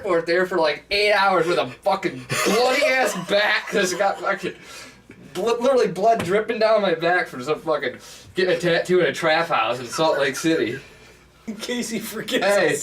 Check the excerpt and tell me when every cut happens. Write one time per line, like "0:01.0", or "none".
0:11.4